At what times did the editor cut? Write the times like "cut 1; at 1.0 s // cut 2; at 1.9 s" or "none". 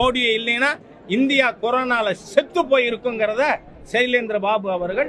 none